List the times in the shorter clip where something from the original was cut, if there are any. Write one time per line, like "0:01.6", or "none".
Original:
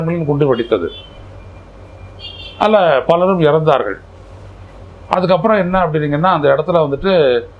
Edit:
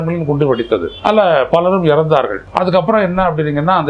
0:00.9
0:02.4